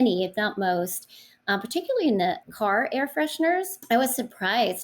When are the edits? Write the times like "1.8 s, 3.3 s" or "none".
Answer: 2.5 s, 3.8 s